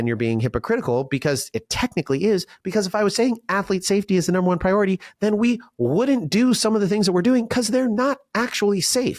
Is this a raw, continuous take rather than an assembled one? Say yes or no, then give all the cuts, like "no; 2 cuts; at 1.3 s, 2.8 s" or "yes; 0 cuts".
yes; 0 cuts